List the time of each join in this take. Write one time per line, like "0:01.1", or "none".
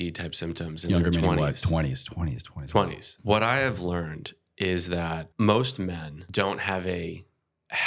0:03.1
0:05.3
0:06.1